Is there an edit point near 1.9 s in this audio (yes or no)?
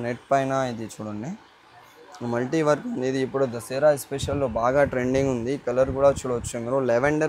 no